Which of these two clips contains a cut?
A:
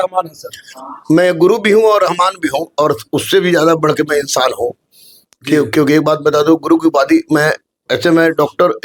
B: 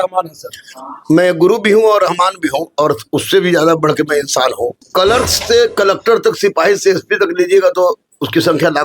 B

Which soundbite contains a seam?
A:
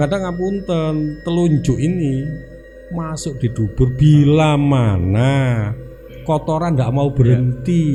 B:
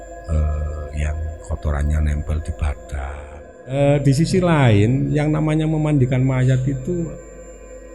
B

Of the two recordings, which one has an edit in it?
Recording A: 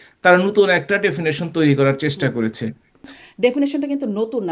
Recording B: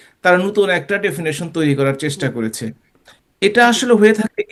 A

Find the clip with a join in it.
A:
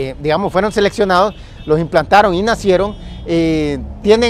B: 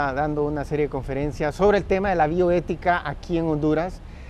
B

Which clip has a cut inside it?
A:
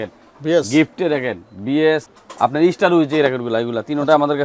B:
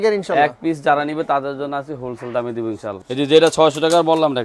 B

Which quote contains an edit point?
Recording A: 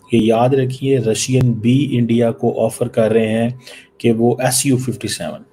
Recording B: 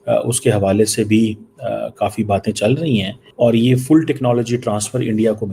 B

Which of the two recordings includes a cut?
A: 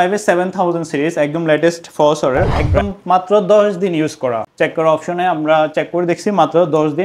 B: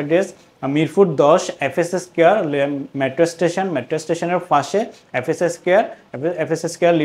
A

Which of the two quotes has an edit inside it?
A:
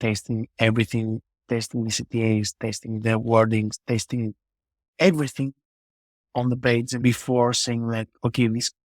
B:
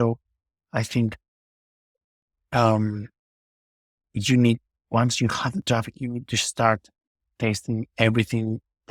A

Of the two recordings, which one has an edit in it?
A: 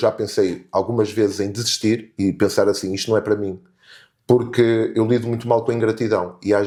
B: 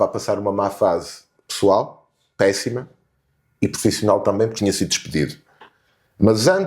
B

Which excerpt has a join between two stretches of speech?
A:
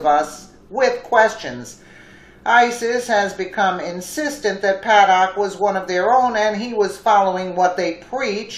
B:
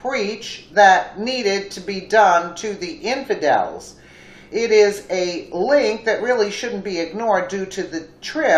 B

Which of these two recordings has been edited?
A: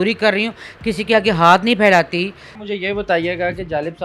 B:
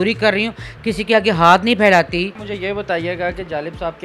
B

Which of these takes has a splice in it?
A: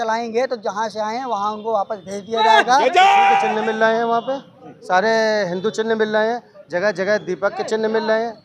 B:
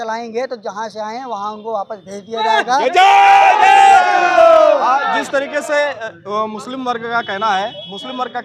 A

